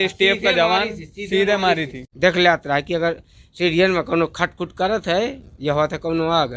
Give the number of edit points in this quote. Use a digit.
1